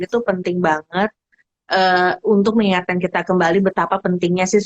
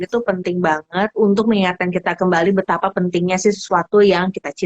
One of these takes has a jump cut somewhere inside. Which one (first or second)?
second